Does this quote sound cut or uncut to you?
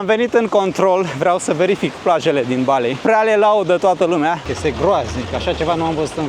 cut